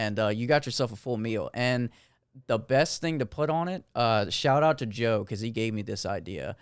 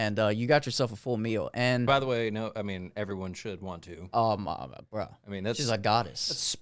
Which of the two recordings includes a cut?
second; 1 cut; at 1.9 s

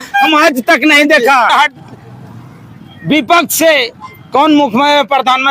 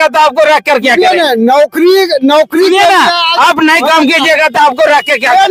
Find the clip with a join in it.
first; 1 cut; at 1.5 s

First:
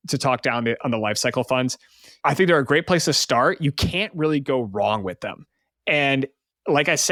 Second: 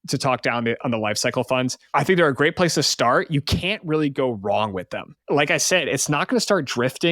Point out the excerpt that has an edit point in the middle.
second; 2 cuts; at 1.8 s, 5.1 s

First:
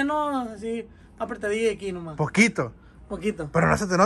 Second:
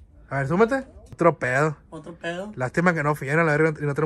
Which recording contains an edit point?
second; 1 cut; at 1.0 s

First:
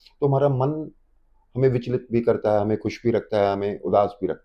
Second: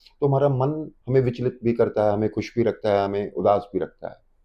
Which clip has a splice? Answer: second; 1 cut; at 0.9 s

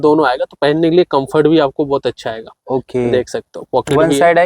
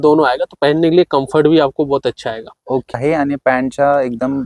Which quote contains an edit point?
second; 1 cut; at 2.9 s

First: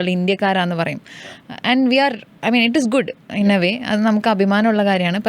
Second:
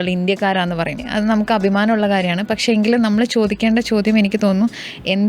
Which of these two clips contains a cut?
second; 1 cut; at 1.0 s

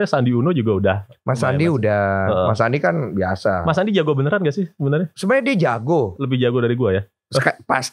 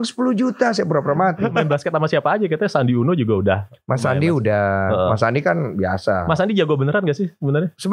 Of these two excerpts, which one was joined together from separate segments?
second; 1 cut; at 1.6 s

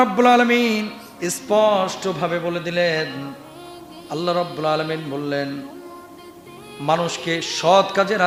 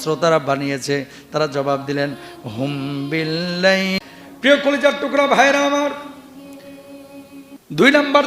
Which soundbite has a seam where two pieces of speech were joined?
second; 1 cut; at 4.0 s

